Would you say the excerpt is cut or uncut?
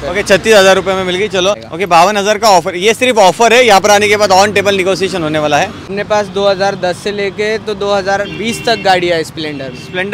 cut